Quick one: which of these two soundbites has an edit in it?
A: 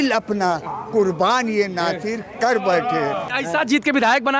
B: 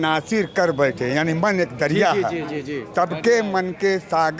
A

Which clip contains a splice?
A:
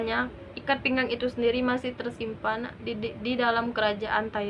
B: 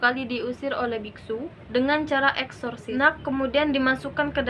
B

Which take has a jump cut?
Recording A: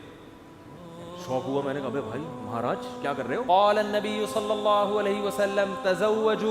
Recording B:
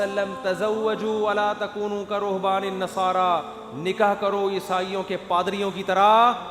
A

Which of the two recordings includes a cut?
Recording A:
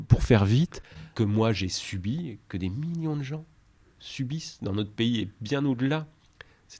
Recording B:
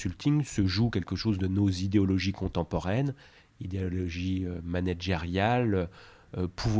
A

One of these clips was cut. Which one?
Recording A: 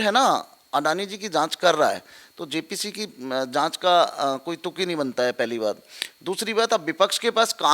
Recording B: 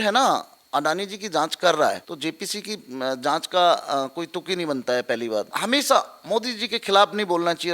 B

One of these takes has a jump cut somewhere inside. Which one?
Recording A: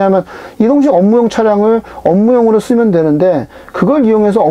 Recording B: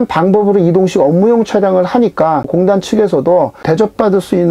B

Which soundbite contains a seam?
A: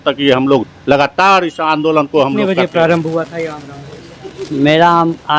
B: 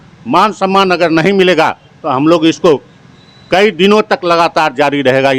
A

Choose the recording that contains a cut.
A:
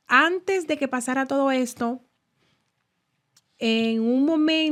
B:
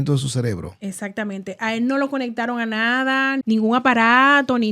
B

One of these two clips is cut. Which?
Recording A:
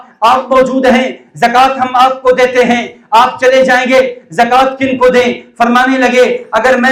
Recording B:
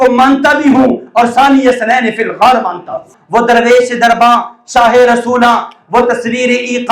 B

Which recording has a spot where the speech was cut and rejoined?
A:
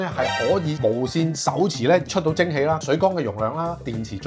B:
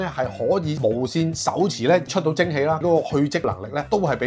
B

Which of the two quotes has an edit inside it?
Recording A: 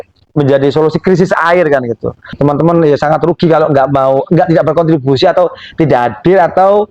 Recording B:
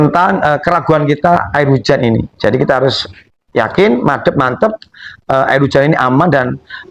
A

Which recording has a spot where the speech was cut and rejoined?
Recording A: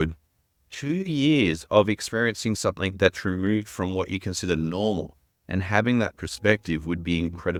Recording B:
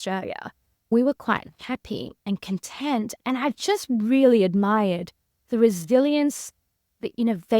B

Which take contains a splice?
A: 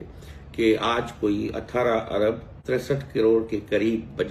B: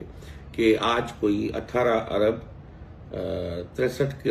A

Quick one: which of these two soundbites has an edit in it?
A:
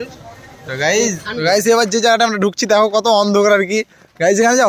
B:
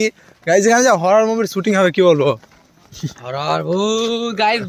A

